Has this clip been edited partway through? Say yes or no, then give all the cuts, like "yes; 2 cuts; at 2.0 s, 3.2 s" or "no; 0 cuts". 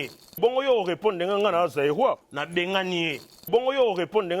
yes; 1 cut; at 2.3 s